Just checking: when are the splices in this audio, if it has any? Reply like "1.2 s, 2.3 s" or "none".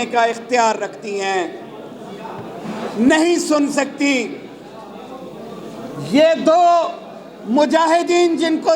none